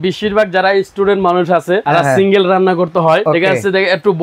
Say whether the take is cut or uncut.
cut